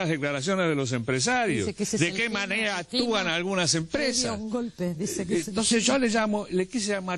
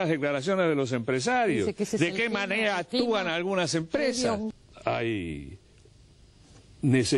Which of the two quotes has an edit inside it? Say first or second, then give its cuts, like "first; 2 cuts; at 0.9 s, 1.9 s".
second; 1 cut; at 4.5 s